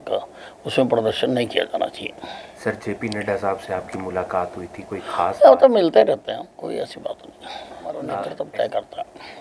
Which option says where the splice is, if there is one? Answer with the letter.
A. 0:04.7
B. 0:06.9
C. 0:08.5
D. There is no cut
C